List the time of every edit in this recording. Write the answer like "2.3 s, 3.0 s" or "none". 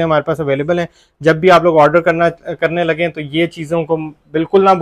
none